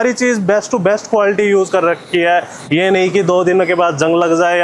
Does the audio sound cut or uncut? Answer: uncut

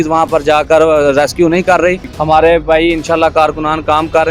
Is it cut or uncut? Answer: cut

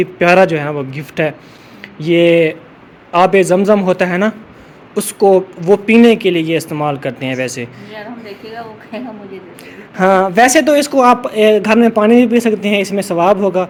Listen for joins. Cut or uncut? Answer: uncut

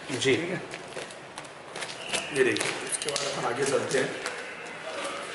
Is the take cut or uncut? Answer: uncut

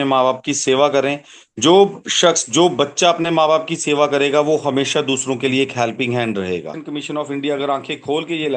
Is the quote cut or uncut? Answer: cut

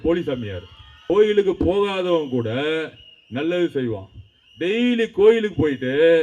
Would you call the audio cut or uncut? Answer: cut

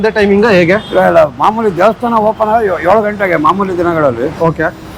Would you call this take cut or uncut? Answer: uncut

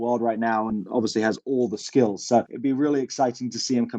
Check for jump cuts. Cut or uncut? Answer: cut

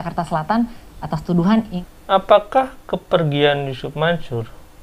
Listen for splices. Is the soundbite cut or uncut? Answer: cut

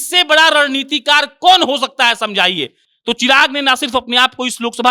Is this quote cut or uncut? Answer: uncut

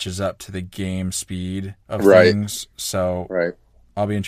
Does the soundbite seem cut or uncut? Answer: cut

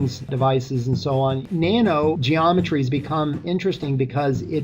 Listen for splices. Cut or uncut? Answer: cut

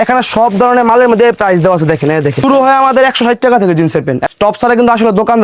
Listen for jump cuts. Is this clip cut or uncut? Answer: cut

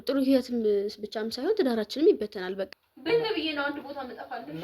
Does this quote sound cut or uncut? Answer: cut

